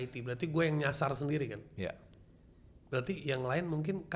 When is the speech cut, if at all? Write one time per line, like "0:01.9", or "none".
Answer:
none